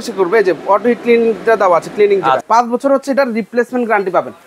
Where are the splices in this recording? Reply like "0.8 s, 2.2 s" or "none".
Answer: 2.4 s